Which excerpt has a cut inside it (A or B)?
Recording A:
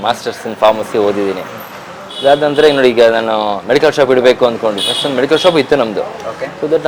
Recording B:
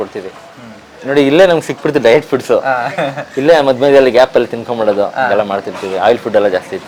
B